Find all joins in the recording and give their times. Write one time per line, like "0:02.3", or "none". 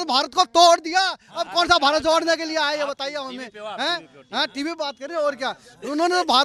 none